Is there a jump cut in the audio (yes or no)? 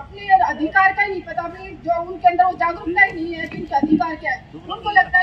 no